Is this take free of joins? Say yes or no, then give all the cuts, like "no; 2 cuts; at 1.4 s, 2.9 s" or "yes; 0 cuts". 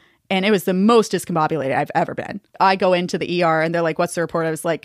yes; 0 cuts